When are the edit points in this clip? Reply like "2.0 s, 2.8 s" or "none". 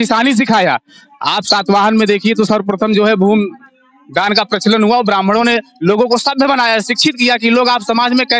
none